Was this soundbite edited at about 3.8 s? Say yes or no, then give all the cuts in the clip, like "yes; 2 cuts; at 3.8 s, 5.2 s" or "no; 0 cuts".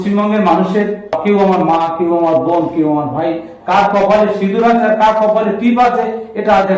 no; 1 cut; at 1.2 s